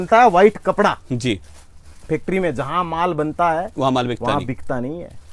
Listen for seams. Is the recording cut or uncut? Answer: uncut